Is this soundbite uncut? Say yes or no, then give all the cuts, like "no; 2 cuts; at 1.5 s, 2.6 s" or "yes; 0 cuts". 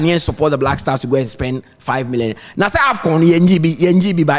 yes; 0 cuts